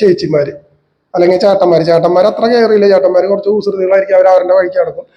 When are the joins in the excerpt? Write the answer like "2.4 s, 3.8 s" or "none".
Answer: none